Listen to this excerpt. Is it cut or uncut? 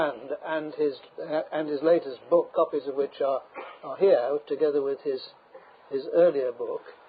uncut